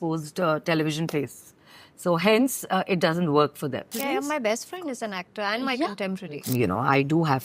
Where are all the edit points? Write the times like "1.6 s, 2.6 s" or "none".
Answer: 4.0 s, 6.4 s